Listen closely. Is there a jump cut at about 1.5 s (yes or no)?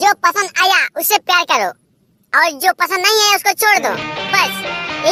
no